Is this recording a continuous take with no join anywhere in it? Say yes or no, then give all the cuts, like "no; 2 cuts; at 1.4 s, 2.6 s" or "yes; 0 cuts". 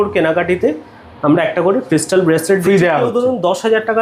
yes; 0 cuts